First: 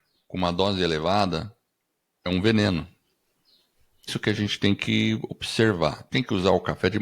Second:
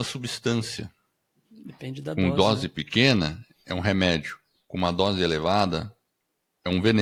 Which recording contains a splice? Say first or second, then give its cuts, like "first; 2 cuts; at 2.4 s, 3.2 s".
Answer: first; 2 cuts; at 4.1 s, 6.0 s